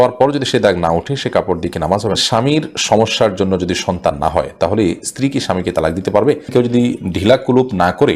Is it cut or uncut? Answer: cut